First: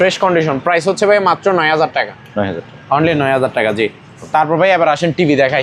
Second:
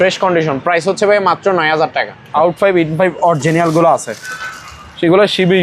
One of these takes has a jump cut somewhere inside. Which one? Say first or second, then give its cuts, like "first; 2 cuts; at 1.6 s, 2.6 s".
second; 1 cut; at 2.2 s